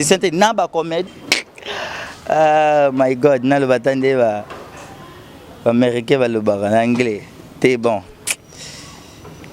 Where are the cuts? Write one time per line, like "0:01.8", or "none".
0:01.0